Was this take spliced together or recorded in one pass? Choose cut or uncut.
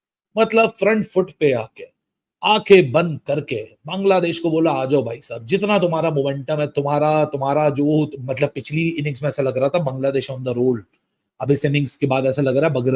uncut